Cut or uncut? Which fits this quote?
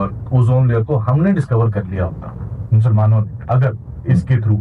uncut